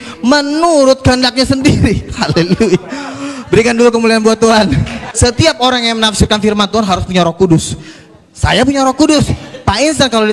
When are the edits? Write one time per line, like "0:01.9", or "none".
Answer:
0:05.0

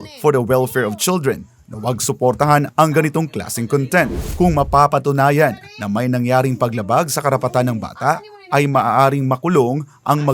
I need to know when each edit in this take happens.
0:04.2

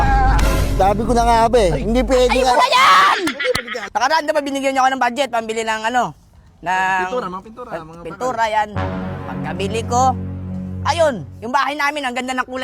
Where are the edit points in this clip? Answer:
0:03.7

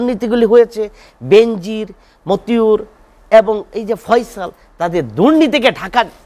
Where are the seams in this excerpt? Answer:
none

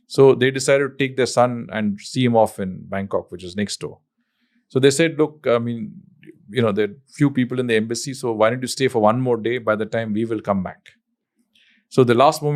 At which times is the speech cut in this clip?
none

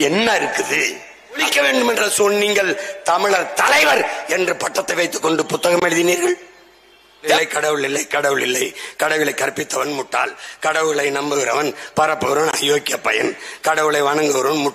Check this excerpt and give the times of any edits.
0:01.4
0:07.4

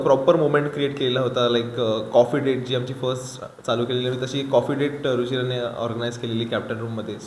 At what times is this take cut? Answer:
none

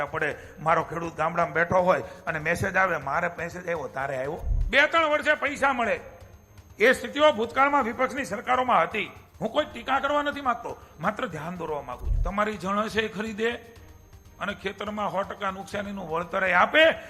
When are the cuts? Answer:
0:04.5
0:09.2
0:12.1

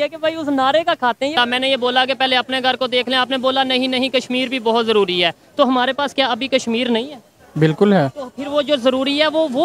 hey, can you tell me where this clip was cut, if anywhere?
0:01.3

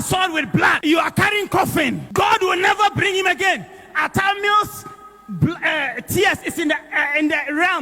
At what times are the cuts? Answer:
0:00.8
0:02.0

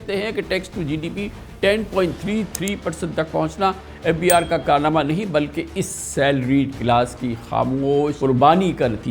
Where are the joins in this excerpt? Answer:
0:08.2

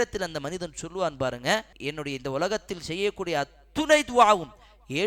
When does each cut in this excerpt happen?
0:01.7

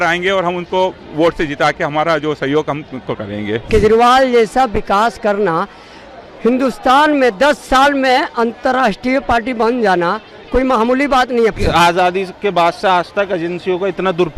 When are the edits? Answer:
0:03.6
0:11.6

